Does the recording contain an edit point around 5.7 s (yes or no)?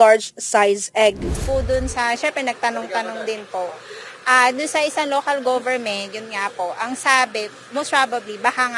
no